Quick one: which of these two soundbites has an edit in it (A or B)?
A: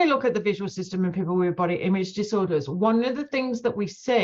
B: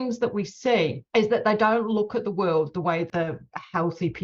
B